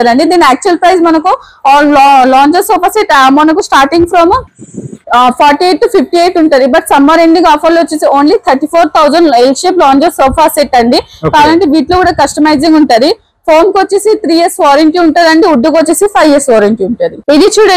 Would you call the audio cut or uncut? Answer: uncut